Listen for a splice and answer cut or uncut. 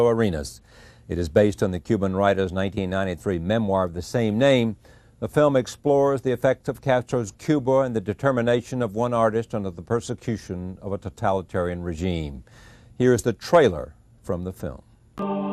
cut